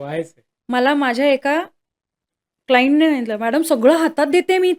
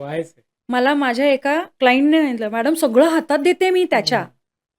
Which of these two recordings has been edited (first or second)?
second